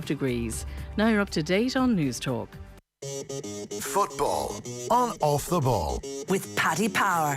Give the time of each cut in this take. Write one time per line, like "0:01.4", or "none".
0:02.8